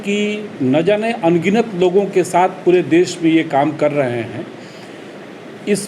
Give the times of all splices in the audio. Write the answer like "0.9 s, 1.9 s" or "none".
none